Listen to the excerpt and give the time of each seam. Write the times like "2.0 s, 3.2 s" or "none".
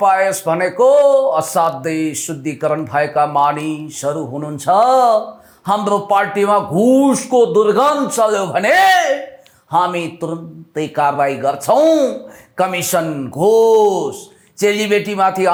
none